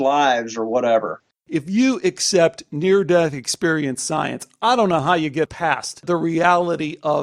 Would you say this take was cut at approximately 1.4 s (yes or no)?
yes